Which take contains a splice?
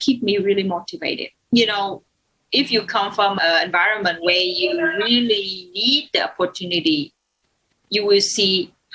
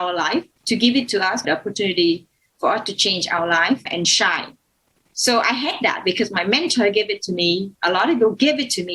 first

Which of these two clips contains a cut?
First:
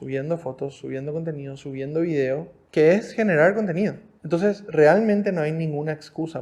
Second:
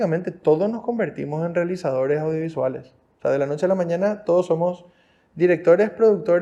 first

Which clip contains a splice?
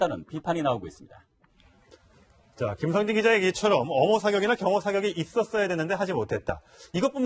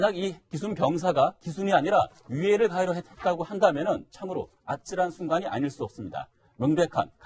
first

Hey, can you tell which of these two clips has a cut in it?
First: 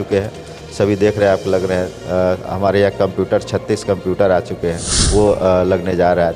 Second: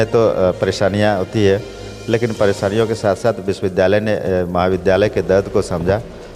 first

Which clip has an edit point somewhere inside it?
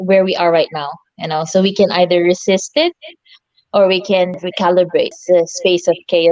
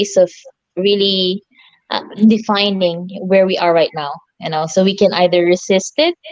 first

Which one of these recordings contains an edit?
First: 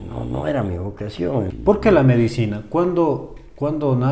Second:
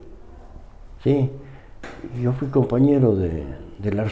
first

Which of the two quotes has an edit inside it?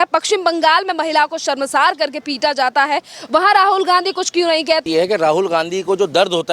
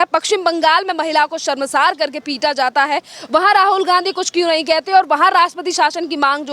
first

